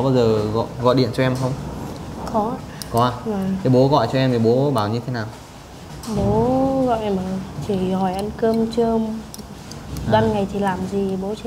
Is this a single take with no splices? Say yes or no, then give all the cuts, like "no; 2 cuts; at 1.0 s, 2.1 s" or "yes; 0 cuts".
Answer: yes; 0 cuts